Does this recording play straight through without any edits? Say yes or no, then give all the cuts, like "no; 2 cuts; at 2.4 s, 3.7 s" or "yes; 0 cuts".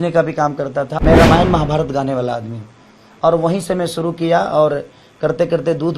no; 1 cut; at 0.9 s